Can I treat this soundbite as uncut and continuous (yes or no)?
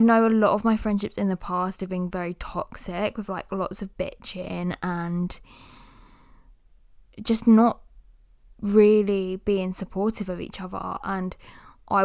yes